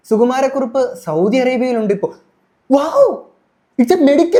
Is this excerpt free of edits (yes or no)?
yes